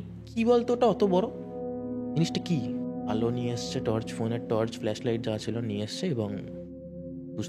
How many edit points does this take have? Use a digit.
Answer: 1